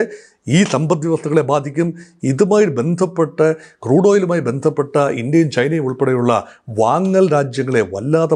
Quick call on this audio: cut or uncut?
uncut